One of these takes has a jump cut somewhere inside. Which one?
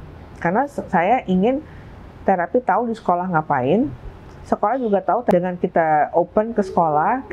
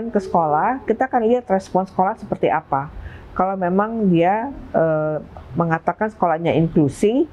first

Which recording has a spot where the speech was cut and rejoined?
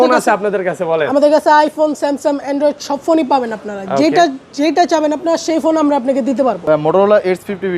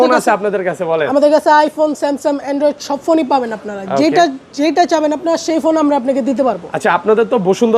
first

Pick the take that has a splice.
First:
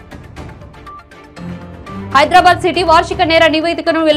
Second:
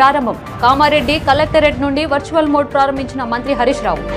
first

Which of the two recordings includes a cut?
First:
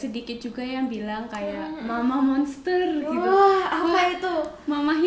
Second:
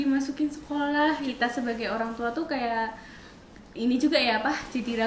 second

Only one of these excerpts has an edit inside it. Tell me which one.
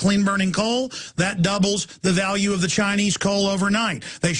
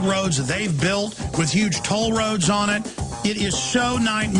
first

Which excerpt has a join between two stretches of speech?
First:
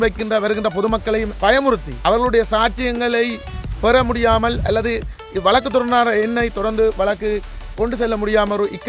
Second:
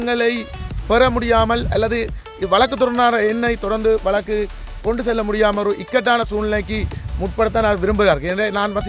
first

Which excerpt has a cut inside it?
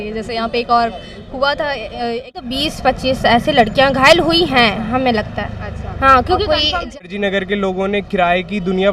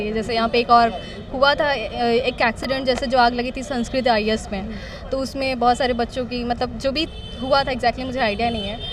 first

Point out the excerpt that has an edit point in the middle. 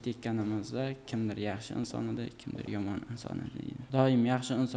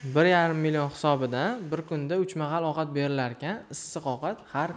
first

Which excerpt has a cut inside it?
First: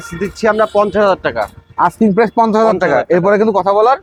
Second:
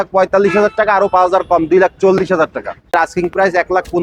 second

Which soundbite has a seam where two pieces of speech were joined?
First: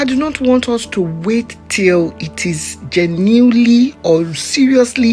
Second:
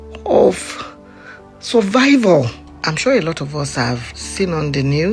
second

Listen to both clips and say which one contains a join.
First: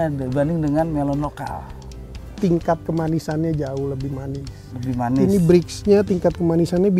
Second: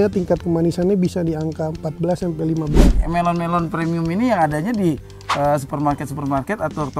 second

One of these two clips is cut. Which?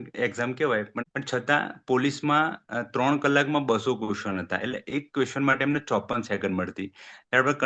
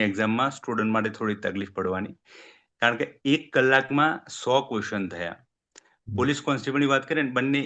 first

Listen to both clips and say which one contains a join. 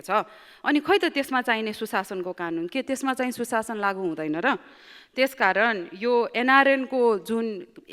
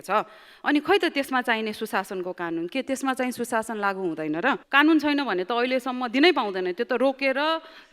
second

